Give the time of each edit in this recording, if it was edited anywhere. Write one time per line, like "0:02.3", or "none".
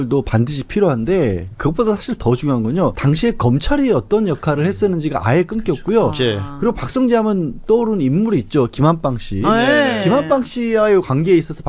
0:03.0